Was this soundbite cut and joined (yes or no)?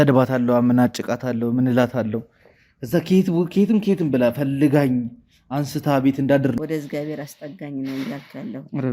yes